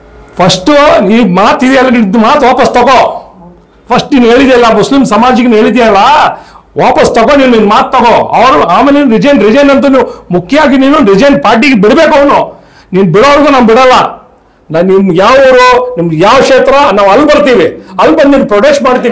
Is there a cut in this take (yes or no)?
no